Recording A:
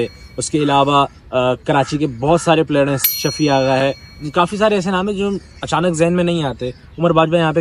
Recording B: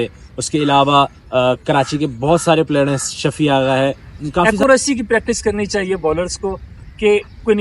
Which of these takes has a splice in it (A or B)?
B